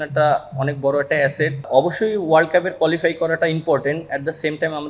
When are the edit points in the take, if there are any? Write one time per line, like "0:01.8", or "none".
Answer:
0:01.6